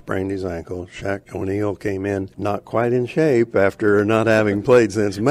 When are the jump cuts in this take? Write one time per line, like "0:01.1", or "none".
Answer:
0:01.3
0:02.3